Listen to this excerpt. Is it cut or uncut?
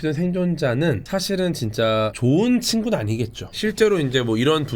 uncut